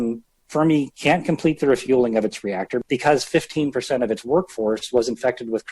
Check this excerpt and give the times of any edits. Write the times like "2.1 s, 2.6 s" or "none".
2.8 s